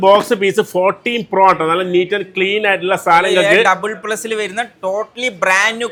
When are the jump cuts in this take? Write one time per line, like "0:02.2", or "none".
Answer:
none